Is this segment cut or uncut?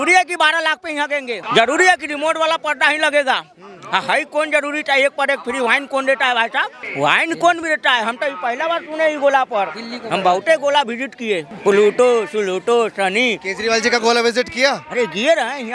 cut